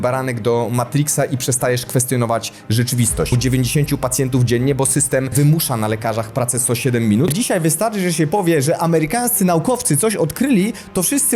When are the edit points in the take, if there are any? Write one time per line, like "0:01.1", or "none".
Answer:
0:03.4
0:05.3
0:07.3